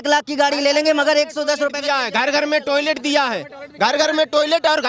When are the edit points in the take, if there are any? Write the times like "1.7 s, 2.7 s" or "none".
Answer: none